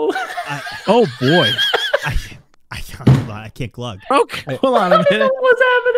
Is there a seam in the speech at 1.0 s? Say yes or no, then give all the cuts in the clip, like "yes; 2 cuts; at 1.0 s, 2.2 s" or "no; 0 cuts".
no; 1 cut; at 4.1 s